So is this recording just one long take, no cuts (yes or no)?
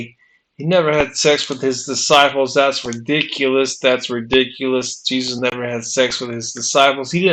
yes